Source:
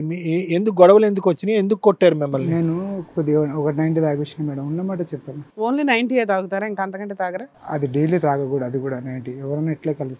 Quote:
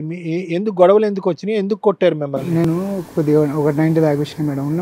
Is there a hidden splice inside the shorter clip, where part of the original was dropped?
no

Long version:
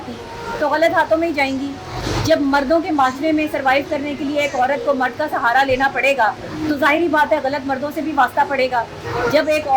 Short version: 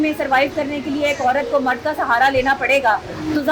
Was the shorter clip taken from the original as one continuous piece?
yes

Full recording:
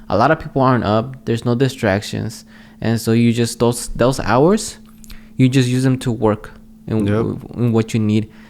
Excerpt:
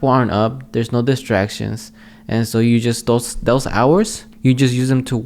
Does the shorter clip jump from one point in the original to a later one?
yes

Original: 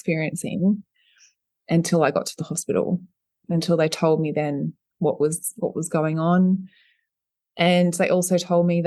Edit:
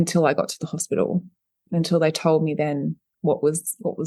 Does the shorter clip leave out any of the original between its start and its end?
no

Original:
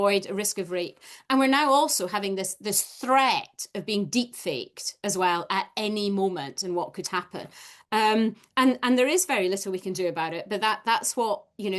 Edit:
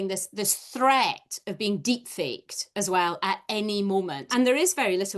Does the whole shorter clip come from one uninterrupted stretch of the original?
no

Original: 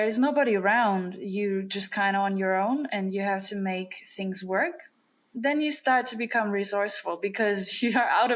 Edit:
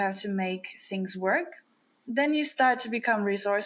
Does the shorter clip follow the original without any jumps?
yes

